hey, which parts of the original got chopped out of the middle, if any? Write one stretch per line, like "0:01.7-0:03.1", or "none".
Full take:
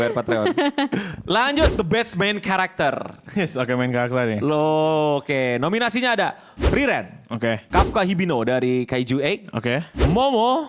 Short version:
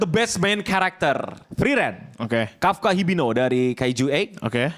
0:03.2-0:06.6